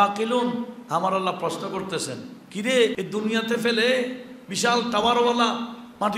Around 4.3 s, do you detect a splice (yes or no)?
no